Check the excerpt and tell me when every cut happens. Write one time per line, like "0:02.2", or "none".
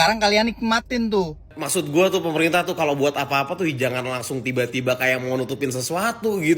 0:01.5